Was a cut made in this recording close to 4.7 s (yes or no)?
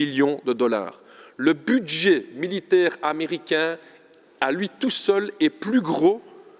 no